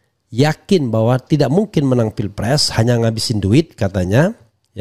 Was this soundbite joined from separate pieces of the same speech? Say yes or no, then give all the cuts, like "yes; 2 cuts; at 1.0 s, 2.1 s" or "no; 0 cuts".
no; 0 cuts